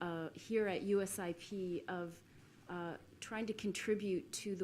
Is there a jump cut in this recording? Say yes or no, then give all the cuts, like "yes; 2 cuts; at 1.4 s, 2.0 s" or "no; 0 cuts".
yes; 1 cut; at 1.8 s